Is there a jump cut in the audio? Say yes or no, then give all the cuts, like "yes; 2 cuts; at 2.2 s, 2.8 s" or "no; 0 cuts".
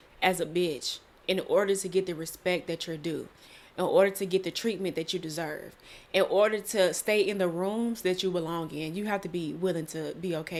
no; 0 cuts